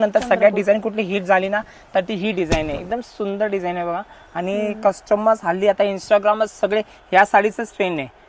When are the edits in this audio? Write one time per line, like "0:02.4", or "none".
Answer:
none